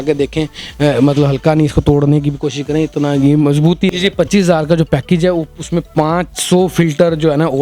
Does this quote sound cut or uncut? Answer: cut